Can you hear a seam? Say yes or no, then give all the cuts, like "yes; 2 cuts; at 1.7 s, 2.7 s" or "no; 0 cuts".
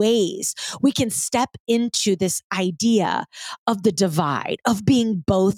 no; 0 cuts